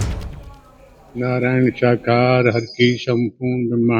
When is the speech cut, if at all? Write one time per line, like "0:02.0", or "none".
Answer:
0:01.1